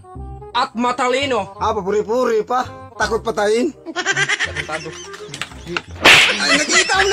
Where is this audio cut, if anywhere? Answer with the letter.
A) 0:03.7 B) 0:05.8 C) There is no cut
C